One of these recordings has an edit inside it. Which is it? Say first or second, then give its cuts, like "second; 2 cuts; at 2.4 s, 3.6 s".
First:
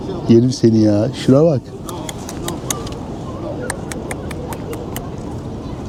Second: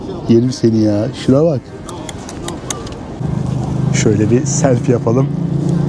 second; 1 cut; at 3.2 s